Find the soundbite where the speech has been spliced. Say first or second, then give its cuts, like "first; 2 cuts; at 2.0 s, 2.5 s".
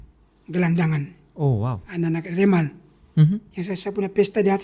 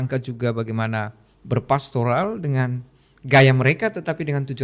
first; 1 cut; at 2.9 s